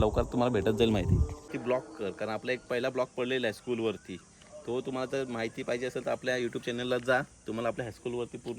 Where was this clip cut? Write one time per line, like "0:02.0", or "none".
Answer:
0:01.5